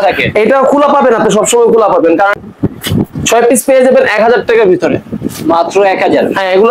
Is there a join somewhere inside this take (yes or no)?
yes